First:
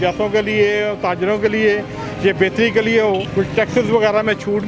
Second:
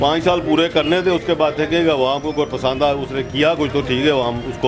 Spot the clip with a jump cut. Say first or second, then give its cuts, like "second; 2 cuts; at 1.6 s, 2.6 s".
first; 1 cut; at 3.3 s